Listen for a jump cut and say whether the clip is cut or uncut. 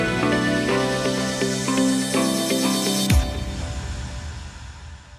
cut